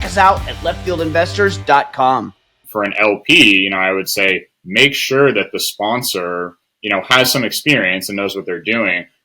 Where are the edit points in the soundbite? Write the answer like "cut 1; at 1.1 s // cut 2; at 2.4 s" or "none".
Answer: cut 1; at 2.6 s